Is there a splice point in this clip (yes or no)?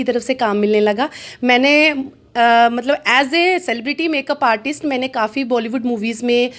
no